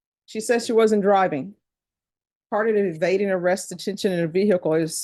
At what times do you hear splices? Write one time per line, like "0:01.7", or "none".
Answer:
none